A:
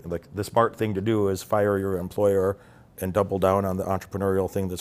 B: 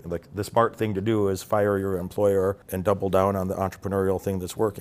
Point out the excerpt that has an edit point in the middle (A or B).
B